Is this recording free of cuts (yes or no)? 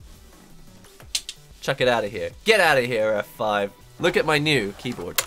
no